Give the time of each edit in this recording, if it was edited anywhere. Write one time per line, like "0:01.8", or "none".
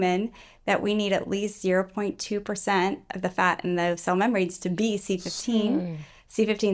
none